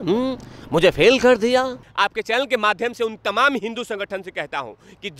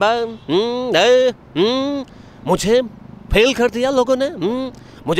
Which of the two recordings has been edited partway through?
first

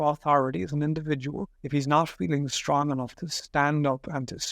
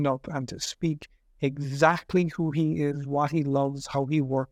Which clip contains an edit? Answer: first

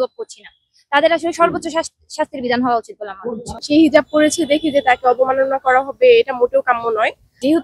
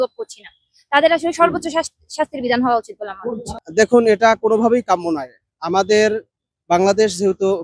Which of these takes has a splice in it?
first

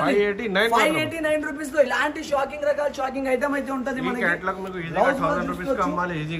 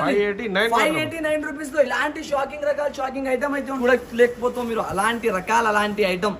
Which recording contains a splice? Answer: second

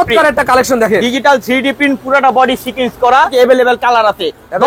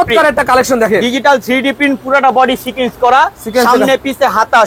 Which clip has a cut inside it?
first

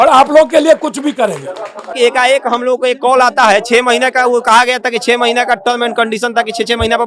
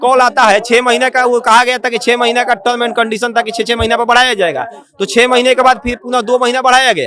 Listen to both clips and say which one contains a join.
first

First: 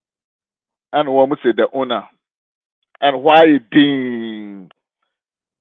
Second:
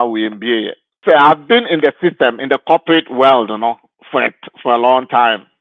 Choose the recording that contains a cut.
second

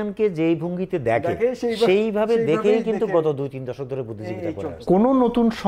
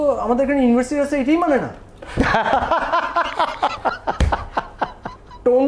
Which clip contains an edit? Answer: first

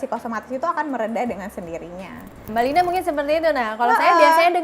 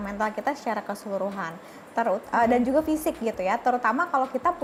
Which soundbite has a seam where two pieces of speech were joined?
first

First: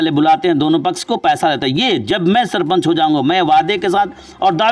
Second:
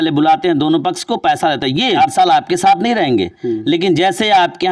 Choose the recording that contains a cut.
second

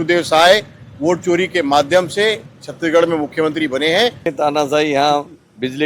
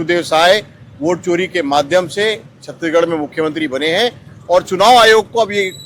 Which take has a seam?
first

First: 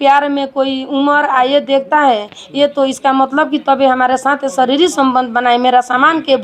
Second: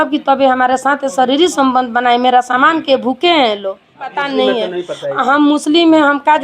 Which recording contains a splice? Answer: second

